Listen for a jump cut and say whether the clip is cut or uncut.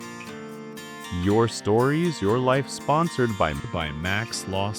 cut